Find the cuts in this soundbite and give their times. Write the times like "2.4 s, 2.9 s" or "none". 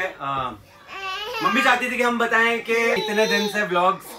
3.0 s